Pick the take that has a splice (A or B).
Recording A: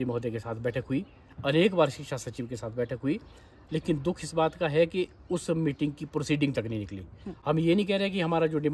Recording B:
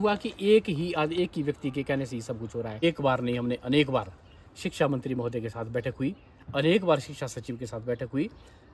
B